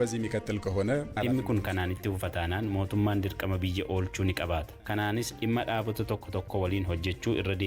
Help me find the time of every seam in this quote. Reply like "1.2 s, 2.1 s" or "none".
1.2 s, 4.8 s